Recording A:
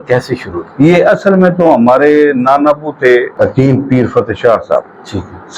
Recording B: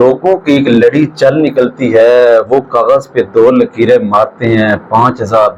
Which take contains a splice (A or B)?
A